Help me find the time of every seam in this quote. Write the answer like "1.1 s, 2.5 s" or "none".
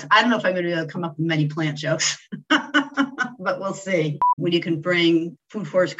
4.3 s